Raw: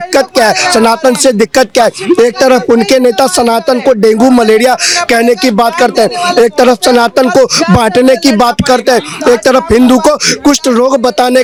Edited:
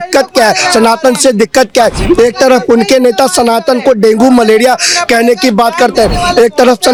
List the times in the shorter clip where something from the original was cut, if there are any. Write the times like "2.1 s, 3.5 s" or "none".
none